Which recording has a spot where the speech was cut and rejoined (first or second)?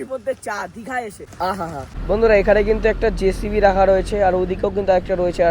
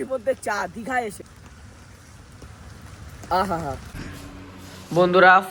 first